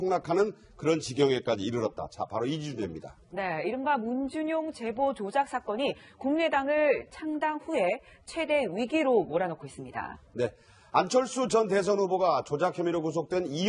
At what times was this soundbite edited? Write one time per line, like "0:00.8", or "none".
none